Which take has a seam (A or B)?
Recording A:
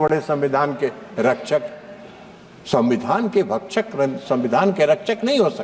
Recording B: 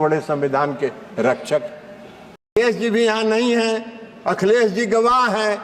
B